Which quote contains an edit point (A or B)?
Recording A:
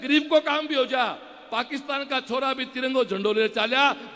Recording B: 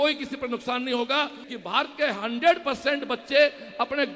B